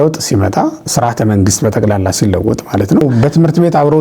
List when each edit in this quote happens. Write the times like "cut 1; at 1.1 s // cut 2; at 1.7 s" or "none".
cut 1; at 3.0 s

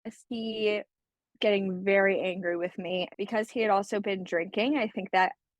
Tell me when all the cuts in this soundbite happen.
cut 1; at 3.1 s

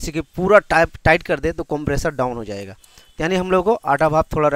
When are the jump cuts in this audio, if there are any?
none

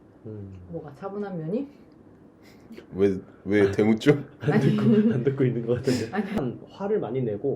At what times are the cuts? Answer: cut 1; at 6.4 s

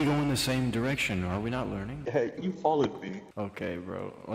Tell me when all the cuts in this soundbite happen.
none

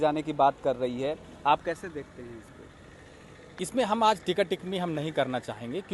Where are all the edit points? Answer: none

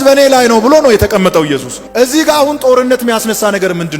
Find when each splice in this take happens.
none

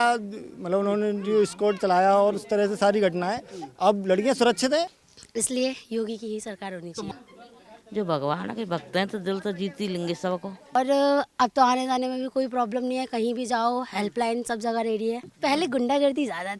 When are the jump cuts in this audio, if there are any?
cut 1; at 4.9 s // cut 2; at 7.1 s // cut 3; at 10.8 s // cut 4; at 15.3 s

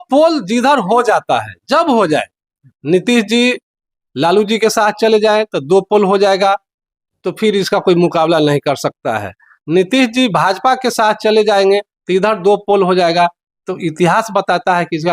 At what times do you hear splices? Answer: none

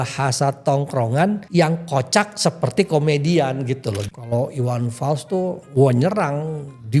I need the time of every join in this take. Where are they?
cut 1; at 1.4 s // cut 2; at 4.0 s // cut 3; at 5.6 s

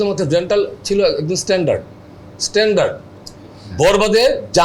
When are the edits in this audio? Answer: none

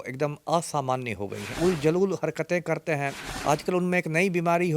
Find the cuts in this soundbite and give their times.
cut 1; at 1.6 s // cut 2; at 3.3 s

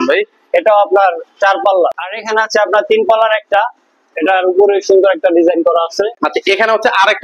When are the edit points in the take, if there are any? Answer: cut 1; at 2.1 s // cut 2; at 6.2 s

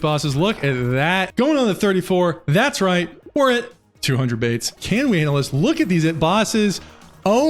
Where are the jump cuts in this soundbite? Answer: cut 1; at 1.3 s // cut 2; at 4.8 s

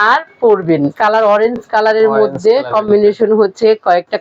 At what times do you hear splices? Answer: cut 1; at 0.9 s

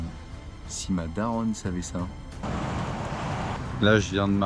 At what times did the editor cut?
cut 1; at 2.3 s // cut 2; at 3.6 s

